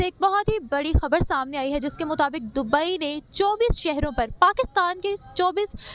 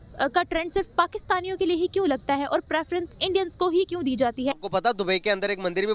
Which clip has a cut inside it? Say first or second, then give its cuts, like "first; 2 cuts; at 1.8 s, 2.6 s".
second; 1 cut; at 4.6 s